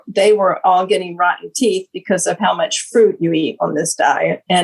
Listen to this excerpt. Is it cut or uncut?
uncut